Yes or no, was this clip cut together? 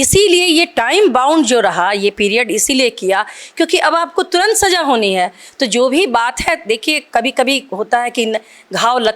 no